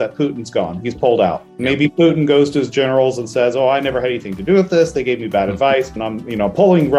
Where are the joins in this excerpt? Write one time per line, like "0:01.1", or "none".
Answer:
0:06.0